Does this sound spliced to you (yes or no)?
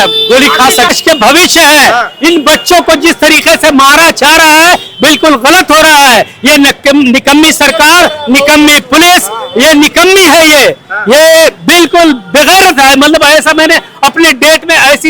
yes